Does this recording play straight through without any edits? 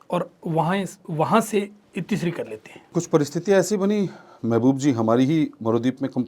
no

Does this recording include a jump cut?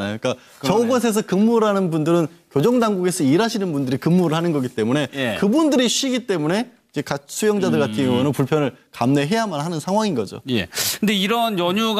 no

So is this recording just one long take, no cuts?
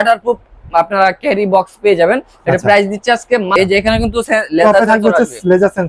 no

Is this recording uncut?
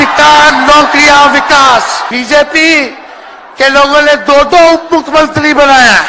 no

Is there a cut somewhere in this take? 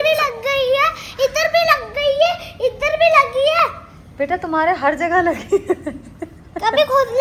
no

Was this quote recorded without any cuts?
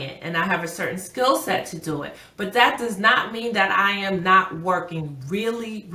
yes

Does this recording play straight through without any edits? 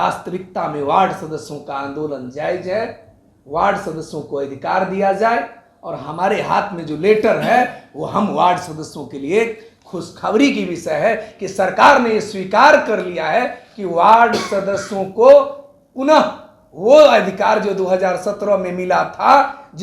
yes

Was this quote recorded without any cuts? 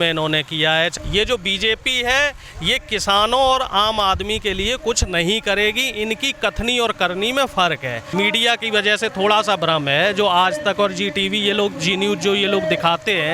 no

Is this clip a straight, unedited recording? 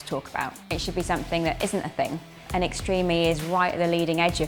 yes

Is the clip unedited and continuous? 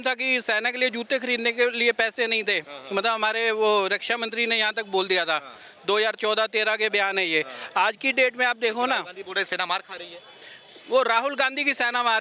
yes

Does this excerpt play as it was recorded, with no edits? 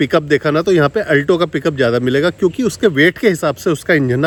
yes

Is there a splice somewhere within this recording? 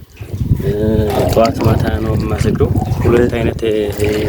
yes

